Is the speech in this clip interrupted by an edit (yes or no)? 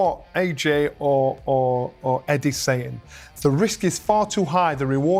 no